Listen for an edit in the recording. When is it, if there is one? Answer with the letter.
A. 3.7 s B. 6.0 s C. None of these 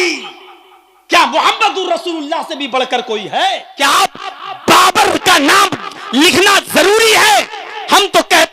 A